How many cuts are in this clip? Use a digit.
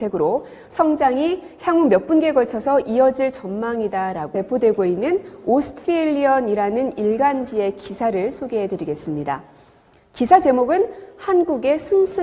0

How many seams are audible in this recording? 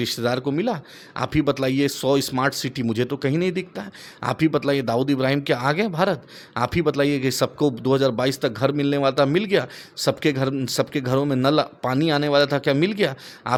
0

